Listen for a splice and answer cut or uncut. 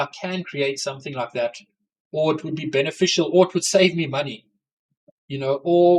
uncut